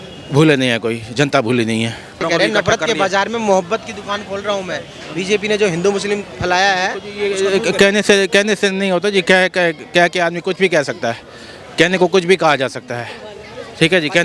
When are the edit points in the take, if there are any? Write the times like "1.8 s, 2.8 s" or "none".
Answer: 2.2 s

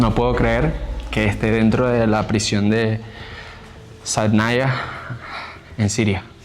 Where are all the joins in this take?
none

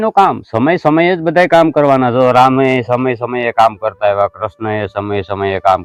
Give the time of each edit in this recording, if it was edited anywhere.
none

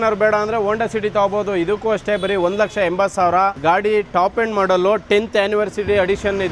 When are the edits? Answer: none

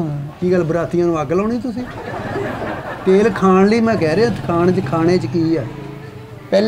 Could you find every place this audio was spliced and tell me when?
none

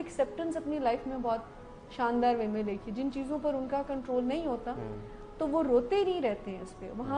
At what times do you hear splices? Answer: none

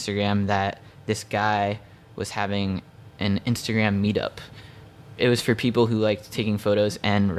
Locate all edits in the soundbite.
none

